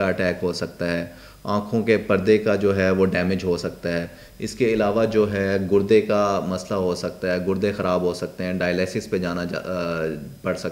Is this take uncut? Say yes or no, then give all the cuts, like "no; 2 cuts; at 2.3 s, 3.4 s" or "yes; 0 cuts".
yes; 0 cuts